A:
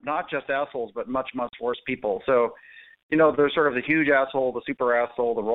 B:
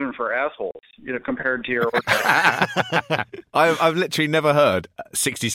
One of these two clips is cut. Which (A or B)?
B